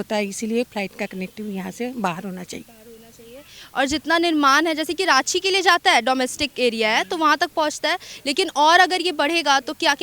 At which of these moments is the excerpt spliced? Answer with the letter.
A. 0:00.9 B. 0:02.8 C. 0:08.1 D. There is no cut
D